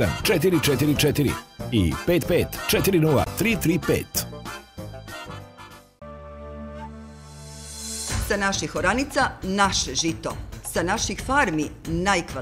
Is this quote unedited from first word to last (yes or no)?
yes